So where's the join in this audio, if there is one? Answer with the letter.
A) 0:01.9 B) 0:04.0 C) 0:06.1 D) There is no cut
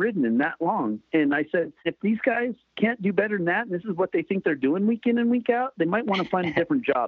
A